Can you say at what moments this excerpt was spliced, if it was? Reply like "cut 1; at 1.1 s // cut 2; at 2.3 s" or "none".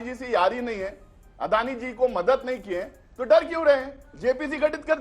cut 1; at 3.9 s

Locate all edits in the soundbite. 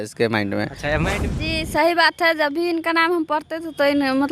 cut 1; at 1.1 s

